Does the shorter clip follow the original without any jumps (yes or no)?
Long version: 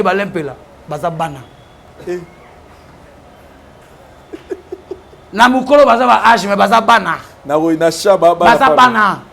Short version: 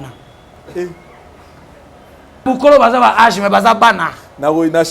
no